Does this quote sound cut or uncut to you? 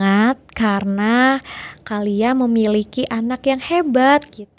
uncut